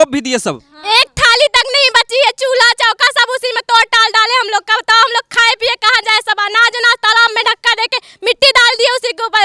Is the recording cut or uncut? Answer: uncut